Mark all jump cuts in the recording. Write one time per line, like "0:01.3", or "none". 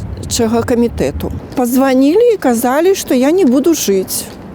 0:01.4